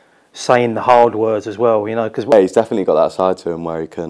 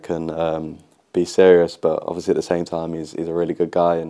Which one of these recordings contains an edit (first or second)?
first